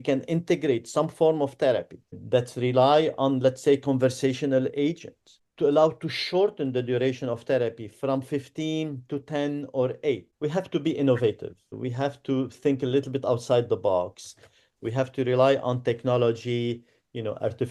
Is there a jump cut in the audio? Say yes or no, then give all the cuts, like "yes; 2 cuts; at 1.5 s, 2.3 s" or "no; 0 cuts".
yes; 2 cuts; at 10.3 s, 11.7 s